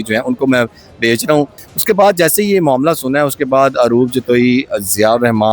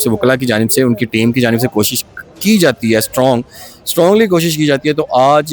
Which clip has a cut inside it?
first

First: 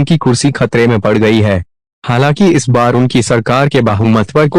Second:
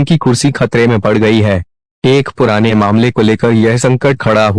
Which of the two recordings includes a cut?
second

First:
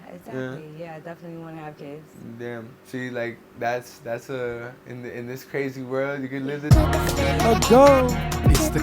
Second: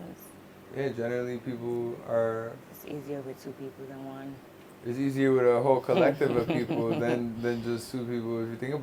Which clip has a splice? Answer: first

